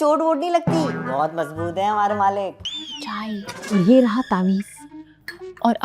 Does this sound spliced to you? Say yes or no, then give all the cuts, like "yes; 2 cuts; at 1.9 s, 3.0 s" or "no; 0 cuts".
yes; 1 cut; at 2.6 s